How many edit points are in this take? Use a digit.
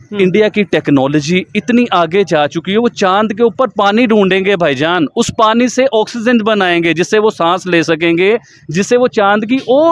0